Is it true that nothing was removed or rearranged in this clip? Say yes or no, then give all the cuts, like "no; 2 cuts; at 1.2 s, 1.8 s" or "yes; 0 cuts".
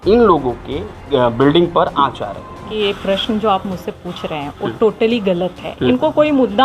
no; 3 cuts; at 1.1 s, 2.6 s, 5.9 s